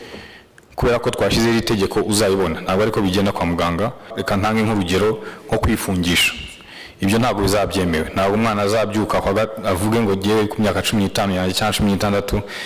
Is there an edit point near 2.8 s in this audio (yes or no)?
no